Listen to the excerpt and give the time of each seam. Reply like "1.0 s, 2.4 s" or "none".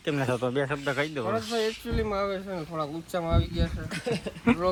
none